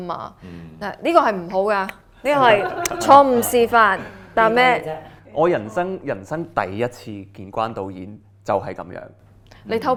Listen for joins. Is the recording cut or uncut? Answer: uncut